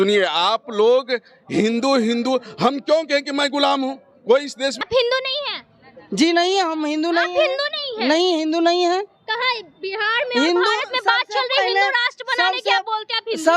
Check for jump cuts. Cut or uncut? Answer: cut